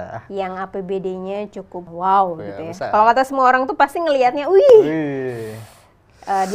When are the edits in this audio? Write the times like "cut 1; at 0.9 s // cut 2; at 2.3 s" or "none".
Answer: cut 1; at 1.9 s